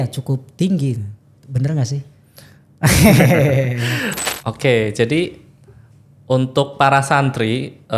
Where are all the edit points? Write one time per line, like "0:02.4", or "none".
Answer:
0:04.1